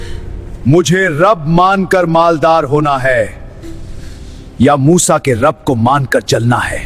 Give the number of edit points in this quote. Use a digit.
0